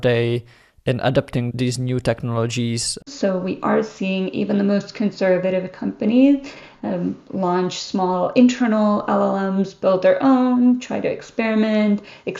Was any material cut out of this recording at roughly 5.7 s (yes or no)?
no